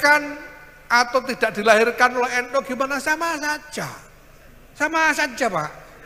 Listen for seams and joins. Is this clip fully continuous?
yes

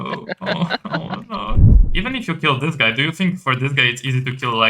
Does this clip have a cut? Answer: yes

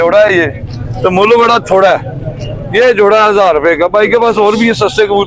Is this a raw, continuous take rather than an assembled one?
yes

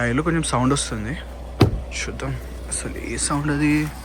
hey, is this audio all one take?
yes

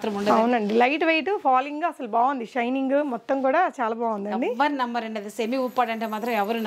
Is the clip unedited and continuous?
yes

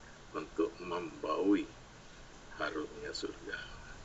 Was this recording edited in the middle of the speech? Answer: no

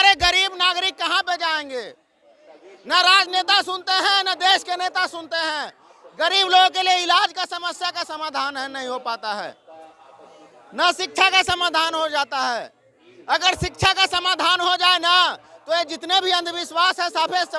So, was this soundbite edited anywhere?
no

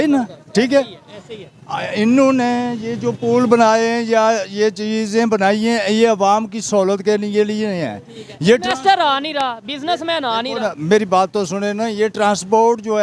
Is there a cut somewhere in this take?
no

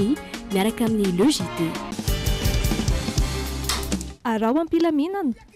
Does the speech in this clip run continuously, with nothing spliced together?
yes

